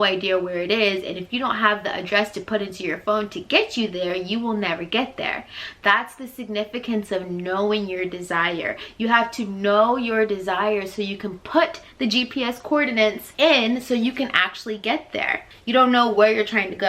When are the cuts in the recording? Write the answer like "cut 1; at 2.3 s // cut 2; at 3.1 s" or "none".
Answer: cut 1; at 13.2 s // cut 2; at 15.4 s